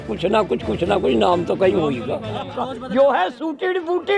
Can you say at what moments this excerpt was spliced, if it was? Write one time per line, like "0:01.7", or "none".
0:02.6